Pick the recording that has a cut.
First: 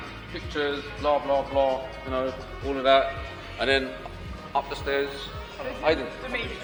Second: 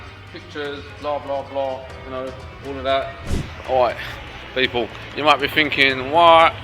second; 1 cut; at 3.5 s

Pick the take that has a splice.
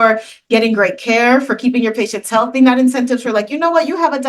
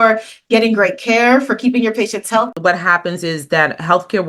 second; 1 cut; at 2.5 s

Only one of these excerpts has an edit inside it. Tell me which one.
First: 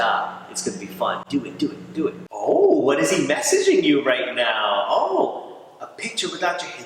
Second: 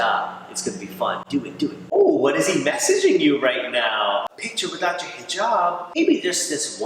second; 3 cuts; at 1.9 s, 4.2 s, 6.0 s

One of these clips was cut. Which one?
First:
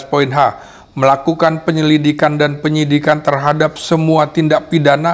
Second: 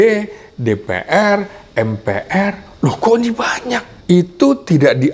second; 1 cut; at 3.9 s

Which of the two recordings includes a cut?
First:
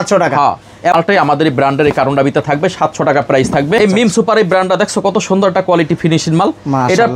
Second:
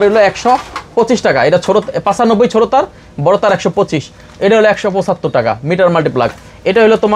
first; 2 cuts; at 0.9 s, 3.8 s

